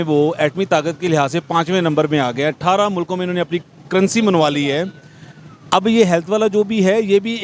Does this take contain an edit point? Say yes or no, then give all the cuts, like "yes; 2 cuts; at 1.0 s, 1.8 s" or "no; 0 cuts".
no; 0 cuts